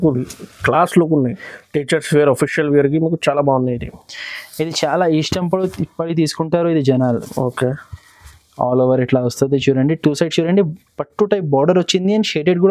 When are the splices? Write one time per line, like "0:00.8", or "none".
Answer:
none